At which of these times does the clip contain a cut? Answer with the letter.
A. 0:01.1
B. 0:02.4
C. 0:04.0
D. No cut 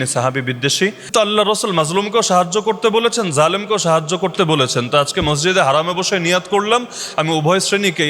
A